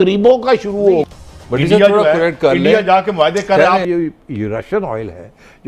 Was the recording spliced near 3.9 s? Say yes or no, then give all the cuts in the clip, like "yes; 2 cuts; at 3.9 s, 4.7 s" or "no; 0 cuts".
yes; 2 cuts; at 1.1 s, 3.9 s